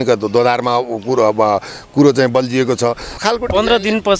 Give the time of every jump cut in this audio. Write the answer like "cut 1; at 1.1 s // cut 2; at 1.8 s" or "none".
cut 1; at 3.2 s